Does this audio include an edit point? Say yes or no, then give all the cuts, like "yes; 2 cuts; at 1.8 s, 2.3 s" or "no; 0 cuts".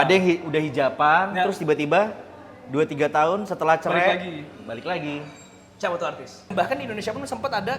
yes; 1 cut; at 6.5 s